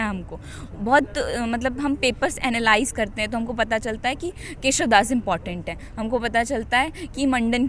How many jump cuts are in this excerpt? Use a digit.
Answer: 0